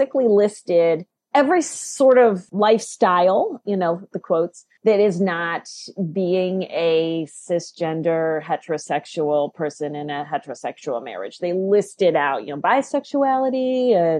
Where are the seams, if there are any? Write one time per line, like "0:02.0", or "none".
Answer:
0:01.1
0:02.5
0:04.7